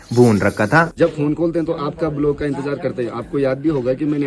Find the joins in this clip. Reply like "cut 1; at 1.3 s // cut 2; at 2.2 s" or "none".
cut 1; at 0.9 s